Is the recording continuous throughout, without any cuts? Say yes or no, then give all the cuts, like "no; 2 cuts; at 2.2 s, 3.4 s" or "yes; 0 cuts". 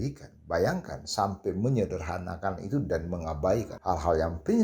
no; 1 cut; at 3.7 s